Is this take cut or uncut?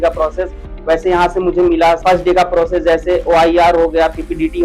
cut